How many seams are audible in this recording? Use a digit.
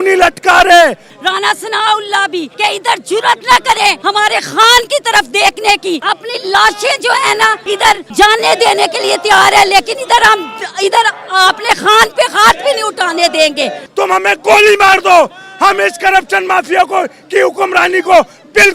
6